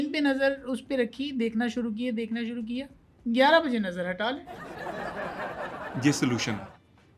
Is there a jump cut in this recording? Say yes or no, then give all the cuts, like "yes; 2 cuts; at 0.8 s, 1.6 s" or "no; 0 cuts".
no; 0 cuts